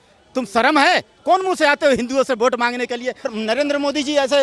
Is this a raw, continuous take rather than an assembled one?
no; 1 cut; at 3.3 s

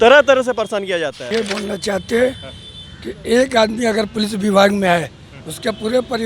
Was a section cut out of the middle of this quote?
yes; 1 cut; at 1.2 s

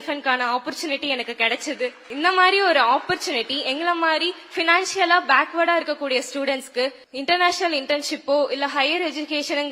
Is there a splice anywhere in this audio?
yes; 2 cuts; at 2.0 s, 7.1 s

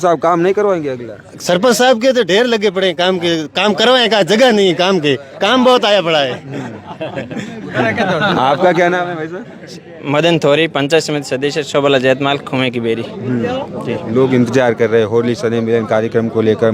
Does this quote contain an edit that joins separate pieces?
no; 0 cuts

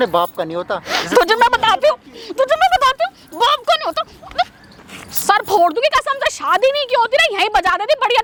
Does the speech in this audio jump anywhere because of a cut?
no; 0 cuts

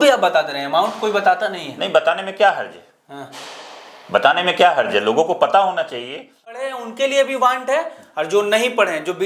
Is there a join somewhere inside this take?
yes; 1 cut; at 6.7 s

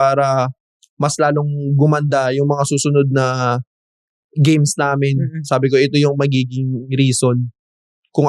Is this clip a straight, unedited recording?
yes; 0 cuts

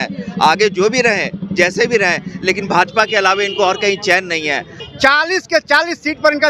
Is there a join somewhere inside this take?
yes; 1 cut; at 4.7 s

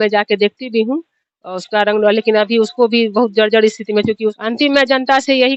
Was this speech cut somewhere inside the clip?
yes; 1 cut; at 4.4 s

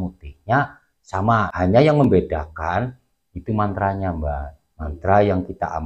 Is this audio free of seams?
no; 1 cut; at 1.5 s

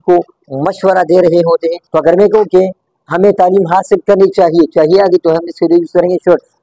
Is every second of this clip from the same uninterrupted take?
no; 1 cut; at 1.8 s

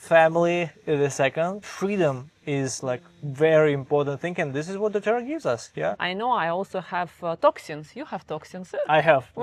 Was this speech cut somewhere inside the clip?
yes; 2 cuts; at 1.7 s, 6.0 s

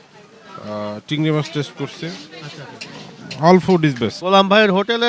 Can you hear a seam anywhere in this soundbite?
yes; 1 cut; at 4.2 s

